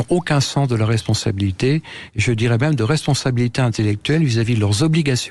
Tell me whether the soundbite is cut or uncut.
uncut